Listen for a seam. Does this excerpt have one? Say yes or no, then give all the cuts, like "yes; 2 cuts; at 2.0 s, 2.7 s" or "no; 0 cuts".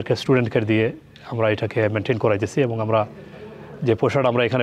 no; 0 cuts